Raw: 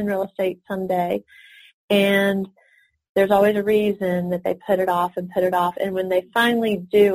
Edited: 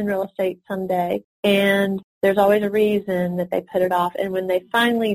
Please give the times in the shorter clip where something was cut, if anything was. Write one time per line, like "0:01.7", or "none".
0:01.3
0:02.1
0:03.7